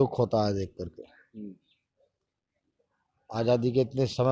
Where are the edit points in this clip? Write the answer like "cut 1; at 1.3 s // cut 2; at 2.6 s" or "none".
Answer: none